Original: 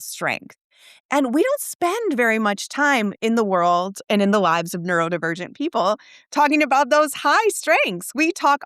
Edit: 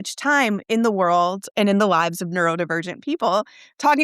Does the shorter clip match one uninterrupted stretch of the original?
yes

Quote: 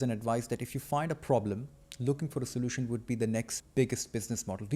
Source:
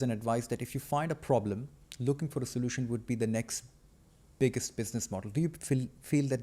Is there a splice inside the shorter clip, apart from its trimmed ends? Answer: yes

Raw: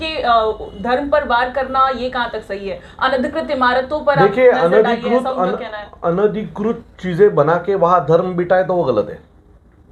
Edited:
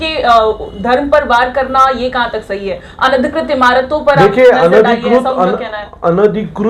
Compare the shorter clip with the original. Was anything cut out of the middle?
no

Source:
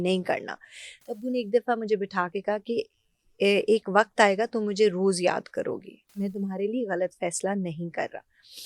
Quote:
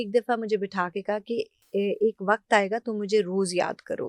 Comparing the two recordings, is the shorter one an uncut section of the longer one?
no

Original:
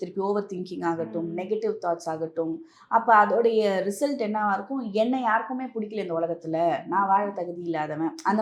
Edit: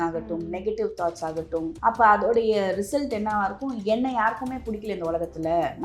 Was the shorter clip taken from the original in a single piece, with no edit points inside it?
no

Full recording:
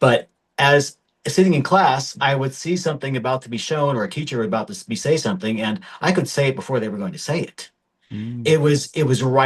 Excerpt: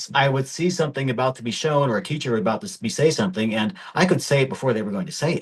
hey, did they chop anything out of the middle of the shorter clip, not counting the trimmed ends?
no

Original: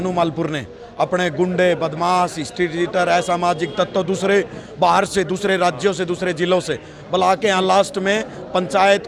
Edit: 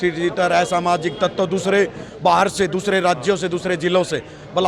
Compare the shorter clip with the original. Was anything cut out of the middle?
no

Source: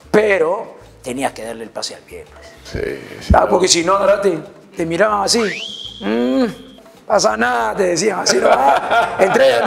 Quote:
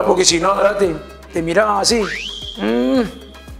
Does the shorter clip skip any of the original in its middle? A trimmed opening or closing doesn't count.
no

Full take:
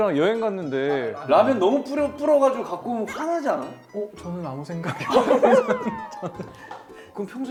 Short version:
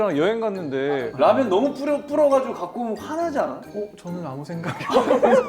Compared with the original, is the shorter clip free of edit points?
no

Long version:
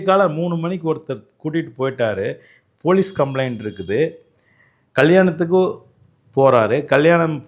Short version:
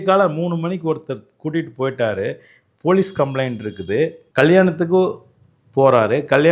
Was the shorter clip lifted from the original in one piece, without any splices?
no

